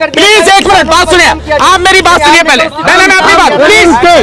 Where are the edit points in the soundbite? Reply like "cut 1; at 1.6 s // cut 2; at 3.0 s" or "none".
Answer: none